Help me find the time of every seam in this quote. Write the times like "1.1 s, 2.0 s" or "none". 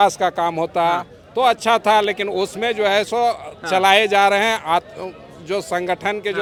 none